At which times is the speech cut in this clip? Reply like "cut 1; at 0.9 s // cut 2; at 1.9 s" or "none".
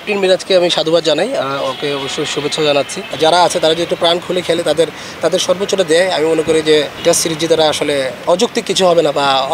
cut 1; at 3.1 s // cut 2; at 6.9 s // cut 3; at 8.2 s